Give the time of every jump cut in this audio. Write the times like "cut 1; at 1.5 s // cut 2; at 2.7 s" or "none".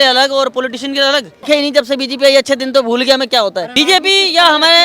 cut 1; at 1.5 s // cut 2; at 3.7 s